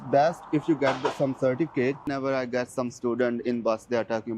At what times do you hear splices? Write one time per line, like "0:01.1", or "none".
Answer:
0:02.1